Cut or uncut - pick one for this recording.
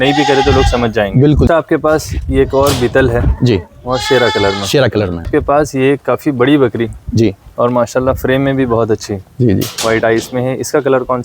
cut